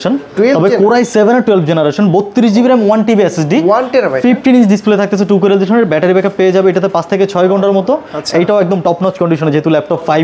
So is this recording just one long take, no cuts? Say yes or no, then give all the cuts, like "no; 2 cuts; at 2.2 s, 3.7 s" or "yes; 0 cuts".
yes; 0 cuts